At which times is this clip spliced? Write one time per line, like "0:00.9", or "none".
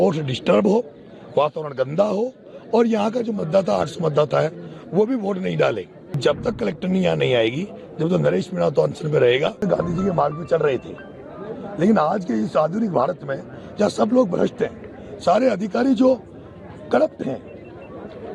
0:06.2
0:09.6